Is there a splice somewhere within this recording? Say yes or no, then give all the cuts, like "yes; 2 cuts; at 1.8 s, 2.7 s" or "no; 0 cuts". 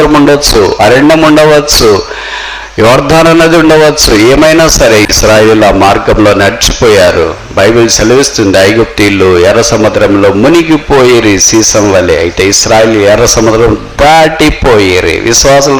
no; 0 cuts